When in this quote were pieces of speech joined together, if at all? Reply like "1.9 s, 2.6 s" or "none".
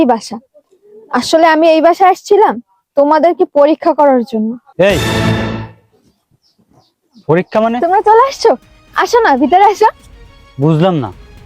7.8 s

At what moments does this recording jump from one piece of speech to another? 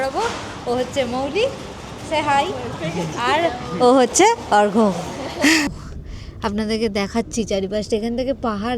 5.7 s

